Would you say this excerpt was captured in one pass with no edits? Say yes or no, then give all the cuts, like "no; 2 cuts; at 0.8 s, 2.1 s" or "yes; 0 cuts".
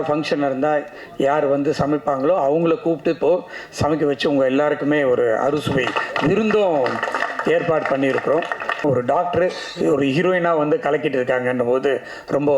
no; 1 cut; at 8.8 s